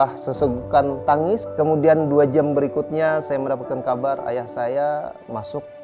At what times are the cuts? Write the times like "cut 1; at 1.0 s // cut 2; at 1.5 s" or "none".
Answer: cut 1; at 1.5 s